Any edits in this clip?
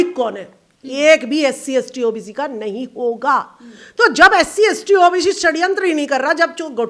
no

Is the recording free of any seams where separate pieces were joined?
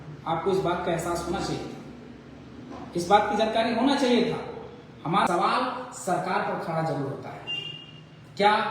no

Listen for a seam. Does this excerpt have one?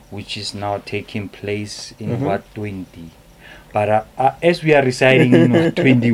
no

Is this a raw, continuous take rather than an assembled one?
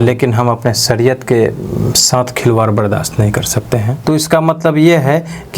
no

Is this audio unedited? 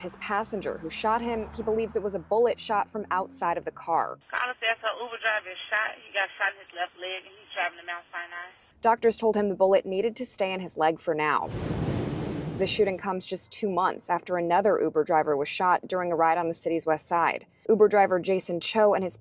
no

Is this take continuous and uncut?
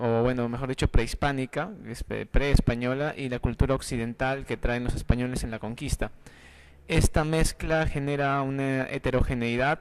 no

